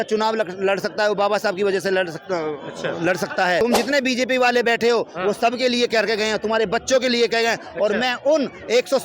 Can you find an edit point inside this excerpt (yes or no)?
yes